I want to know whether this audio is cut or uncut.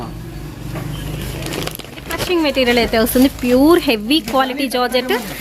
cut